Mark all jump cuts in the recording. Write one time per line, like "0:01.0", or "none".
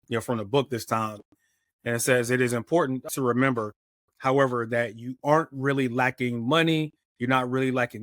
0:03.1